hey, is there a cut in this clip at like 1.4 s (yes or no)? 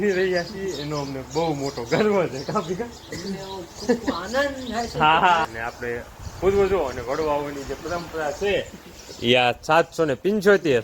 no